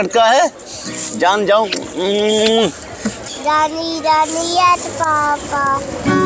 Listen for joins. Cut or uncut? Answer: cut